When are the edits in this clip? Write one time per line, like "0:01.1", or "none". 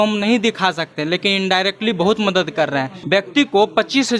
0:02.9

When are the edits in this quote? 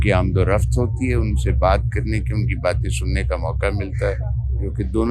none

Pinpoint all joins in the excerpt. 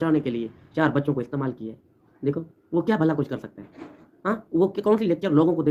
none

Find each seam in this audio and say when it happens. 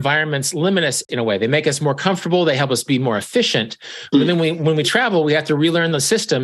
0:01.1

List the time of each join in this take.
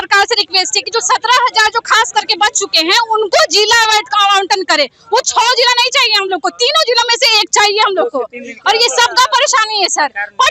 none

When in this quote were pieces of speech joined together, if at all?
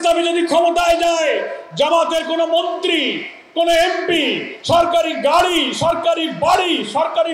none

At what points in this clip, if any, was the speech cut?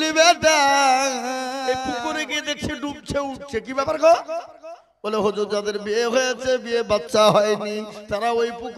0:01.8

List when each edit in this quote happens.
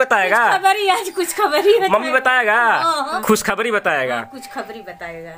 0:03.1

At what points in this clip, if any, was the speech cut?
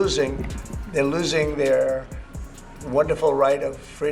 none

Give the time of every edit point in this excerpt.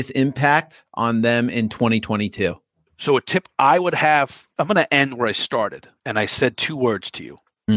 0:02.6
0:04.4

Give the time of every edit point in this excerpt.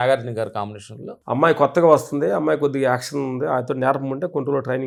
none

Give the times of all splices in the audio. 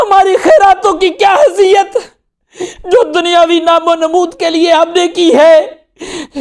none

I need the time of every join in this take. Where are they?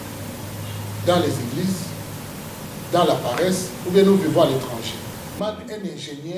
0:05.3

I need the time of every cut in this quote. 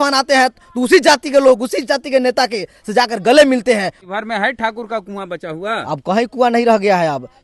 0:04.0

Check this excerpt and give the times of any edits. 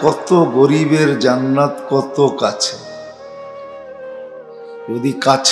none

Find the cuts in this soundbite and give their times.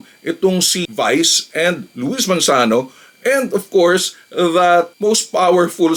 none

